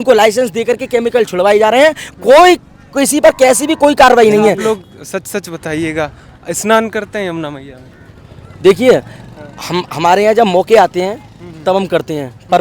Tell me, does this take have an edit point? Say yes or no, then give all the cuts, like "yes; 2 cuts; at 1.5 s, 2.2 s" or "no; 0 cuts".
yes; 1 cut; at 4.6 s